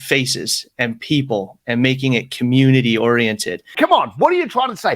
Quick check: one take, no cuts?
no; 1 cut; at 3.7 s

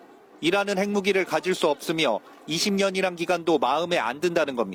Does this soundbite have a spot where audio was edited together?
no; 0 cuts

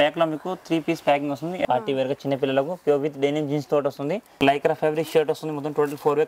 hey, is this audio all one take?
no; 2 cuts; at 1.7 s, 4.3 s

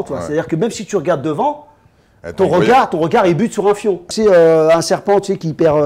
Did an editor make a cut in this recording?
yes; 1 cut; at 4.1 s

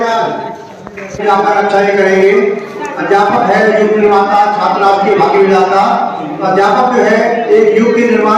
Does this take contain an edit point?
yes; 1 cut; at 1.2 s

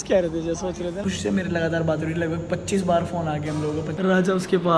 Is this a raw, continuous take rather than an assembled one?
no; 2 cuts; at 1.0 s, 4.0 s

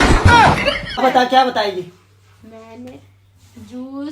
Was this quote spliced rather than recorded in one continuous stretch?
yes; 1 cut; at 1.0 s

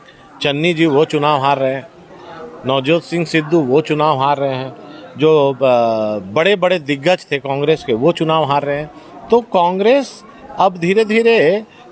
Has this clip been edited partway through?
no; 0 cuts

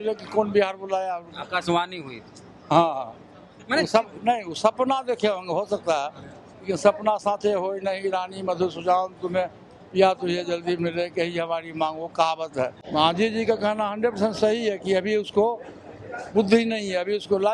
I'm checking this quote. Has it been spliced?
yes; 1 cut; at 12.8 s

